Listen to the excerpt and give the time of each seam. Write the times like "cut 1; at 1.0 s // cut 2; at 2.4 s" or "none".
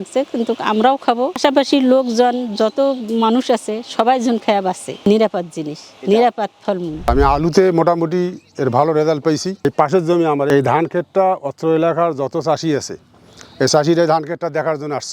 cut 1; at 7.0 s